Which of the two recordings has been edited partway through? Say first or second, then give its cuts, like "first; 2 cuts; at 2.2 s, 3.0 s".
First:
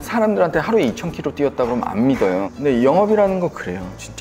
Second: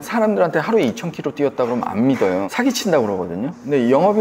first; 1 cut; at 2.5 s